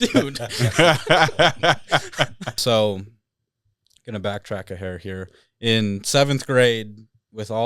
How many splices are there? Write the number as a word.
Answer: one